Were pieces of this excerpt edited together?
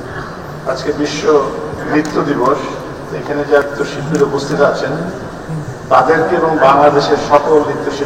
yes; 1 cut; at 3.6 s

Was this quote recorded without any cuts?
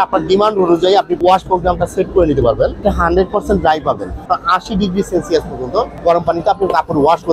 no; 4 cuts; at 1.2 s, 2.8 s, 4.3 s, 5.9 s

